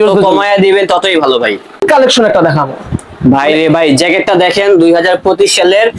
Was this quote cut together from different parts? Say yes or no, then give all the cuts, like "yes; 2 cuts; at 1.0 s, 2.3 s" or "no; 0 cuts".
yes; 1 cut; at 1.8 s